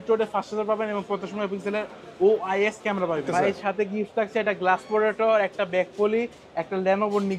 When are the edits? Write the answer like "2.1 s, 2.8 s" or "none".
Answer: 3.3 s